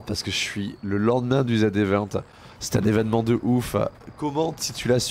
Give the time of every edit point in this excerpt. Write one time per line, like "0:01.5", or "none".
none